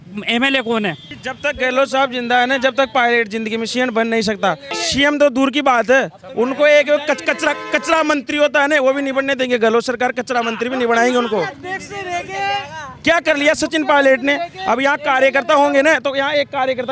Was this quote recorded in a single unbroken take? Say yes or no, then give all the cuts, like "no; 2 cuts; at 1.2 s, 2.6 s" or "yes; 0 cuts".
no; 2 cuts; at 1.1 s, 4.7 s